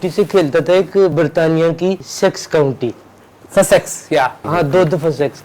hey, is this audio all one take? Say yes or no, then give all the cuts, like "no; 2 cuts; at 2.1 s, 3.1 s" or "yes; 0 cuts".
no; 3 cuts; at 1.1 s, 2.1 s, 4.4 s